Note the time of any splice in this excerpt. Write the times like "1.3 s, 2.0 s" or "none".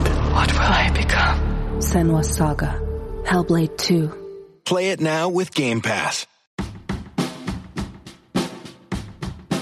6.4 s